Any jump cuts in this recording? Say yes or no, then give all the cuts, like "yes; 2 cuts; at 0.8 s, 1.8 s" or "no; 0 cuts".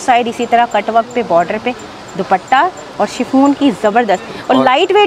no; 0 cuts